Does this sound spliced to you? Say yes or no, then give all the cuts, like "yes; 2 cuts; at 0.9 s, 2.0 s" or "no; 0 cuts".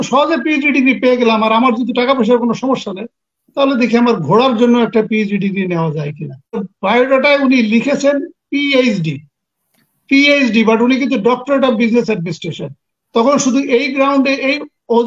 yes; 1 cut; at 6.7 s